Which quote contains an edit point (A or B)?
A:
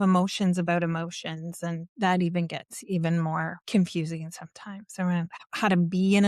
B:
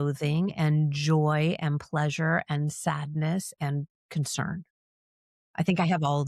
A